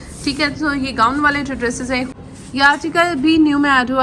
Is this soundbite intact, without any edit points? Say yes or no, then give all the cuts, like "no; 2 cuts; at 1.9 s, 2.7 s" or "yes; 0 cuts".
no; 1 cut; at 2.2 s